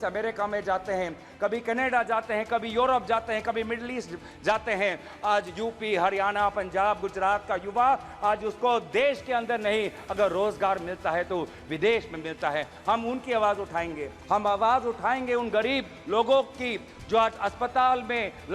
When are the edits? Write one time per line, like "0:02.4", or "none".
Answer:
0:14.1